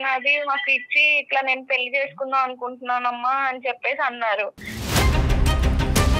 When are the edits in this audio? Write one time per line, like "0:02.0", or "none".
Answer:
0:04.8